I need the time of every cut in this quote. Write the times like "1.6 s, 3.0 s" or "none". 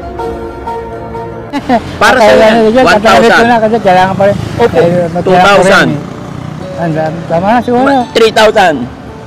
none